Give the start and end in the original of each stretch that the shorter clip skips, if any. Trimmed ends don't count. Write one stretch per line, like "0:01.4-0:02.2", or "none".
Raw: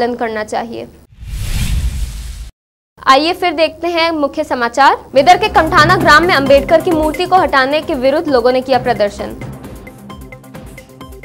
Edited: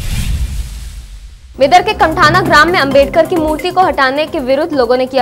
0:02.9-0:05.0